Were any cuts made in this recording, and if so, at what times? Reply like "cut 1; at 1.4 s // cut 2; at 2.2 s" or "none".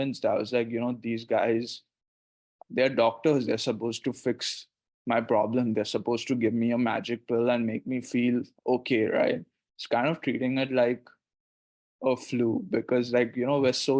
none